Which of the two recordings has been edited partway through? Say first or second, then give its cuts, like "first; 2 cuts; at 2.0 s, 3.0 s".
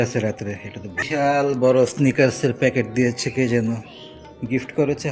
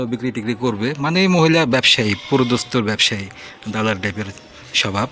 first; 1 cut; at 1.0 s